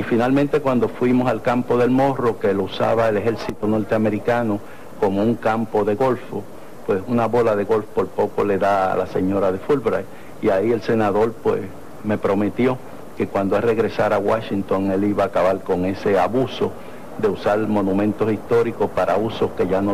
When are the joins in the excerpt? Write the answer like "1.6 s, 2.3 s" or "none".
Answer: 1.8 s